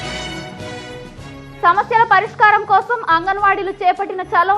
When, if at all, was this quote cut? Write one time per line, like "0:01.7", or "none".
0:01.1